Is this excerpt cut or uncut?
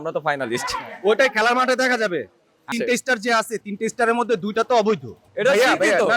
cut